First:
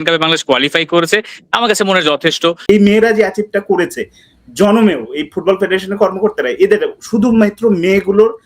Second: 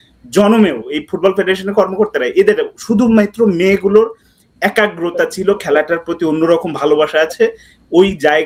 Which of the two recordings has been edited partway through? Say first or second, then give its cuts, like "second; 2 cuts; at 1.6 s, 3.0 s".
first; 1 cut; at 2.7 s